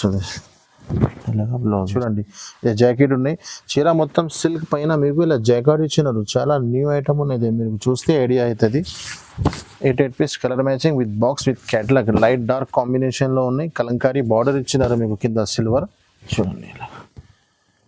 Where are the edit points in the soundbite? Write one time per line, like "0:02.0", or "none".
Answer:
0:01.9
0:16.3